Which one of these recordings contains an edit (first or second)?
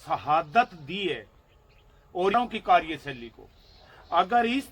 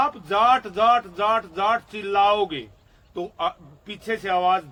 first